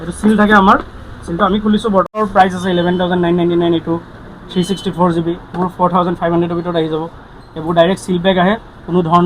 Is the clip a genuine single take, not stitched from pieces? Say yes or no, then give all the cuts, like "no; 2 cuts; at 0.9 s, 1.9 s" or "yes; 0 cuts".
no; 1 cut; at 2.2 s